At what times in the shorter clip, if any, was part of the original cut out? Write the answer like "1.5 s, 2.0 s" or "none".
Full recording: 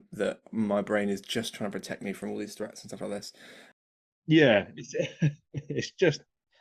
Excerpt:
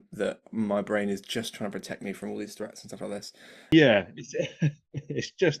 3.7 s

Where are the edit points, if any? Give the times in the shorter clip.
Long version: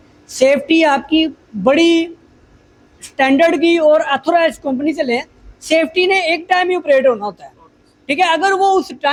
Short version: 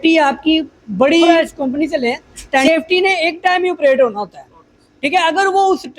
1.3 s

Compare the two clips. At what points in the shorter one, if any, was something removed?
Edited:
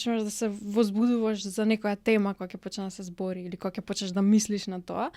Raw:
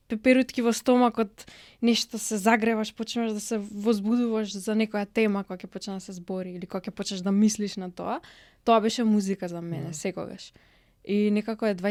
none

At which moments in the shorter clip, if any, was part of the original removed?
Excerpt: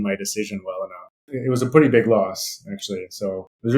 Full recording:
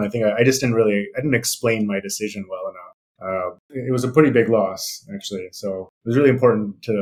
1.2 s

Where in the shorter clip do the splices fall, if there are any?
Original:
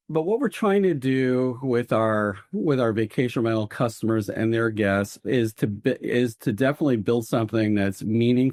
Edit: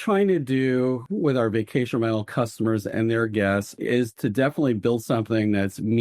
1.0 s, 3.8 s

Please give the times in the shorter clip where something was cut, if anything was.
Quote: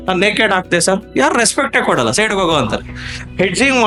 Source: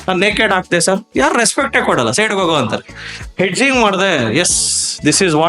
none

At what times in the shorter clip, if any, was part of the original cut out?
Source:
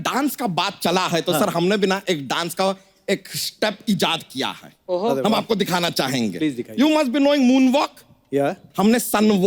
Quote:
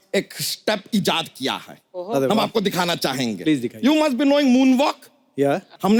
none

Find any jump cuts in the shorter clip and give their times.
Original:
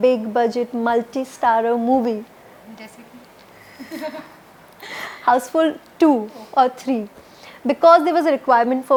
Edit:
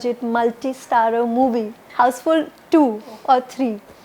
1.8 s

